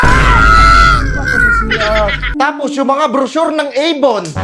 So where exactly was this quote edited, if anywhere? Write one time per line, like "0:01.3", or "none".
0:02.3